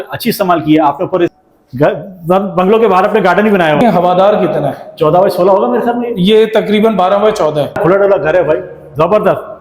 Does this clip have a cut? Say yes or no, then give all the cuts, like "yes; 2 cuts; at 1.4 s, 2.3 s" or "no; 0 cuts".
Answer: yes; 3 cuts; at 1.3 s, 3.8 s, 7.8 s